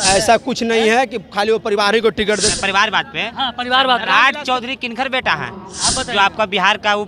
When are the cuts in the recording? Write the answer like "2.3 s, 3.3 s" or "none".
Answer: 2.5 s